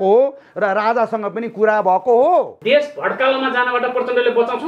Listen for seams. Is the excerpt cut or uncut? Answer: cut